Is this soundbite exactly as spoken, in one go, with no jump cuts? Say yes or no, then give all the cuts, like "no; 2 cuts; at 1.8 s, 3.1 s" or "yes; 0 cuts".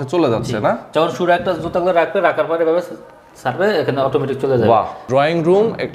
no; 1 cut; at 5.0 s